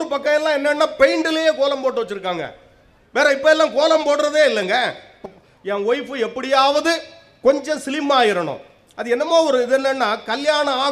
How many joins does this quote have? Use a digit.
1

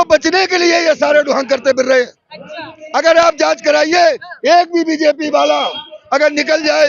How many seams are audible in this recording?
0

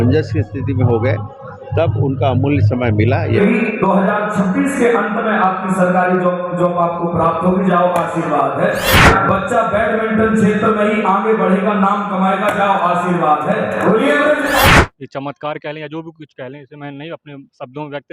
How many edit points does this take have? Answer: 3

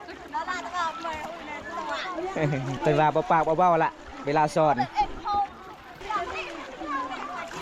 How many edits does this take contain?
2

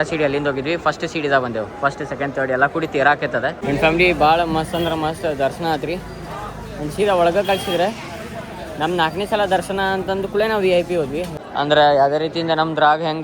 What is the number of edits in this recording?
2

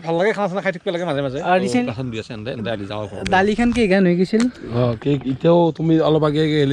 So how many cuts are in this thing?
1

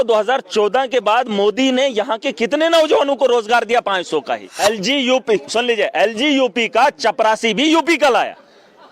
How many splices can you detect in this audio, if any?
1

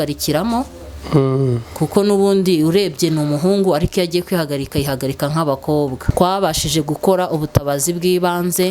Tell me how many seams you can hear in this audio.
1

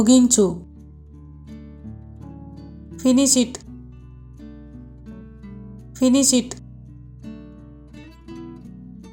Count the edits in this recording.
0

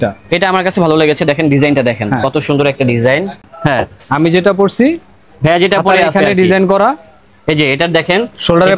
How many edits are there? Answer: 1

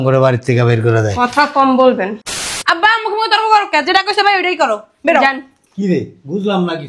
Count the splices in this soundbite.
1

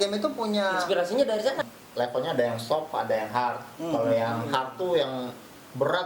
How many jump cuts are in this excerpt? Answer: 1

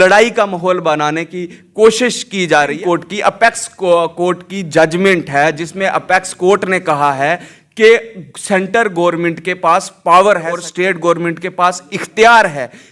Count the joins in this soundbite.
2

